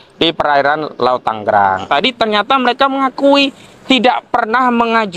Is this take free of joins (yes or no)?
no